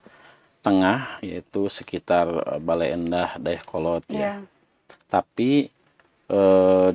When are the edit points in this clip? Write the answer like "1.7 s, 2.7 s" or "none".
none